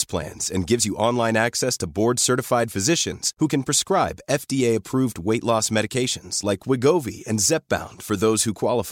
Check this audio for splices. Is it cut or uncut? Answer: uncut